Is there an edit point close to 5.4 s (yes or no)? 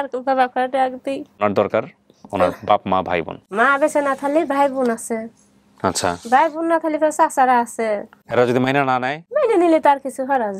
no